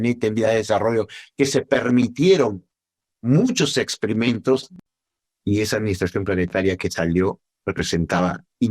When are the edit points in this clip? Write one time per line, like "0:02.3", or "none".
0:04.7